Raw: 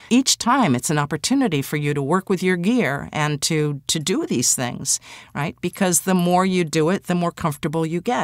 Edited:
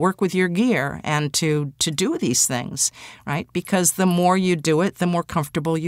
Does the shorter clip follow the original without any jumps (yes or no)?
yes